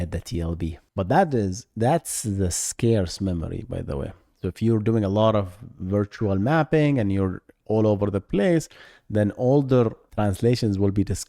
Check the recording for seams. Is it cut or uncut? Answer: cut